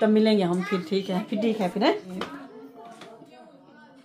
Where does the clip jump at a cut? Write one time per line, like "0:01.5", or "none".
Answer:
0:02.1